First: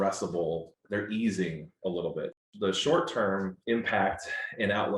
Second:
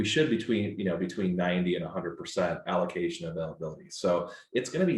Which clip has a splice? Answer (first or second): first